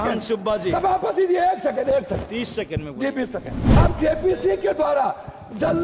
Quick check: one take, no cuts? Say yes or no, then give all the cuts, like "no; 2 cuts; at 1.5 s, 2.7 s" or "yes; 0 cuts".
no; 1 cut; at 3.8 s